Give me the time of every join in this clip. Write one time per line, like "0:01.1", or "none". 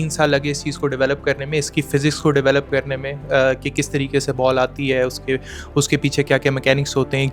none

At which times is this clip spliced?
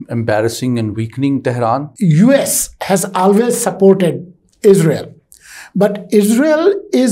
0:01.9

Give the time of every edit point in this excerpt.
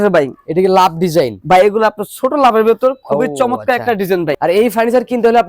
0:04.3

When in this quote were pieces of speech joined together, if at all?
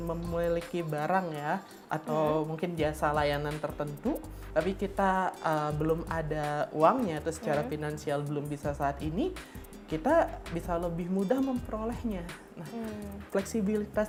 none

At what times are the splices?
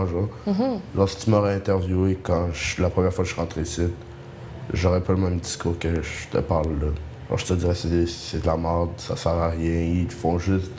none

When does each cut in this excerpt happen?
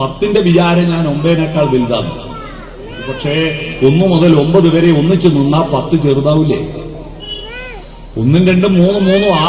0:03.1

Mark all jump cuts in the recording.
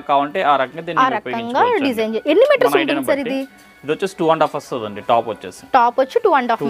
none

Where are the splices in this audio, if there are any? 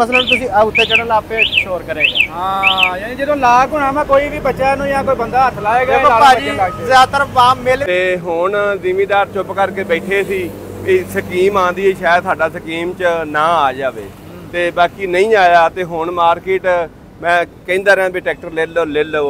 0:07.8

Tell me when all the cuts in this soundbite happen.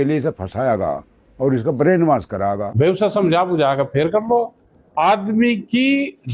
0:02.7

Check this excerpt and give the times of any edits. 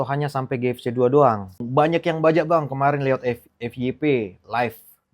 0:01.6

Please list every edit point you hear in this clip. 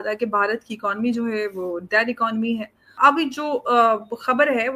0:02.9

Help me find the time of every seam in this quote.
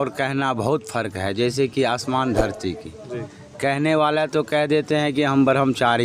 none

